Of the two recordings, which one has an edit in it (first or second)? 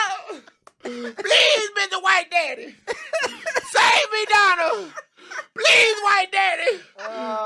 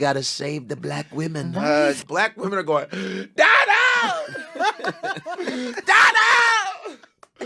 second